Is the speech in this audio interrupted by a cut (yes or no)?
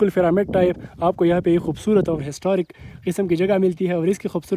no